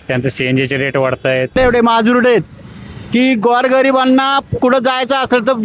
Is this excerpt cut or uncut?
cut